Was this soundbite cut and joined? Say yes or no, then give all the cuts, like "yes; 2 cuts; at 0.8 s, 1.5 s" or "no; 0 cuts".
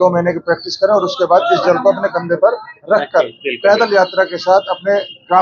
no; 0 cuts